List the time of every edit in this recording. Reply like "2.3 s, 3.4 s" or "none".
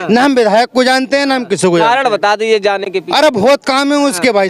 none